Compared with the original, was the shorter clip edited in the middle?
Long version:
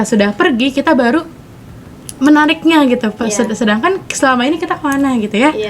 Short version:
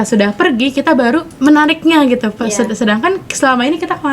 yes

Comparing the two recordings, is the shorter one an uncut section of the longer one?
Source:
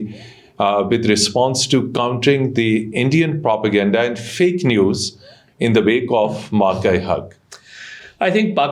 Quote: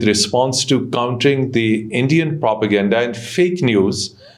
yes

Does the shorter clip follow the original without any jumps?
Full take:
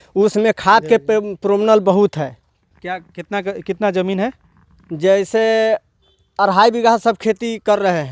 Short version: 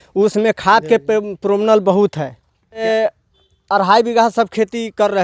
no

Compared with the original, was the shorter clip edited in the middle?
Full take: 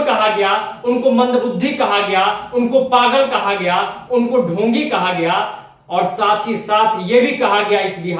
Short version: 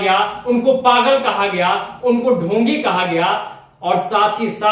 no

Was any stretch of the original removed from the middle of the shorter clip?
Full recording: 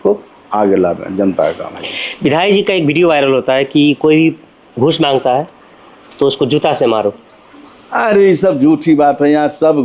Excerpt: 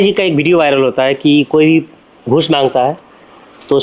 no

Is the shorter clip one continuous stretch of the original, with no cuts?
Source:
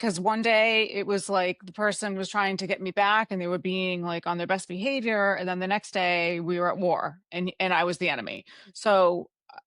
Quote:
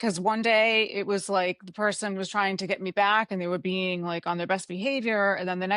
yes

